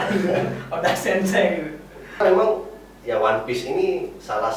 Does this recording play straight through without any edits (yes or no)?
no